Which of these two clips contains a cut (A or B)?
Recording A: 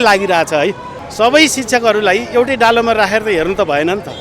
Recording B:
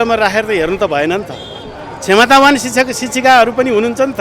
A